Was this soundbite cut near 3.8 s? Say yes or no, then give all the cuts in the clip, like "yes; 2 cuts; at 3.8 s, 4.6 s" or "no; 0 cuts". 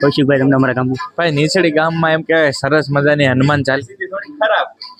yes; 1 cut; at 3.8 s